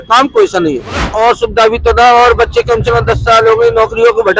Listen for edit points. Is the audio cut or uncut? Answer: cut